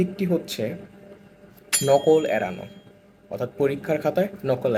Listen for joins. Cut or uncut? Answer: uncut